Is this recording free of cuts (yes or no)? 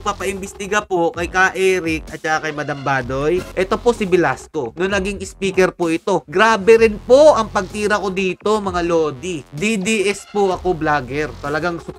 no